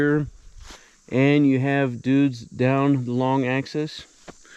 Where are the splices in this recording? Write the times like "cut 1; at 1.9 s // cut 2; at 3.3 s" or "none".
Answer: none